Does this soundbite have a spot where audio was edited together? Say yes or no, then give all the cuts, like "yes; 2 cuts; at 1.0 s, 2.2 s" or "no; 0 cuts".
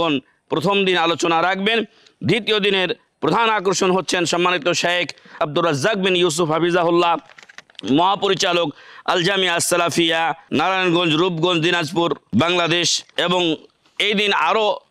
yes; 4 cuts; at 5.3 s, 10.4 s, 12.2 s, 13.0 s